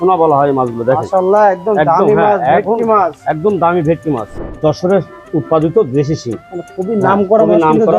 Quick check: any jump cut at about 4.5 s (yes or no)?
yes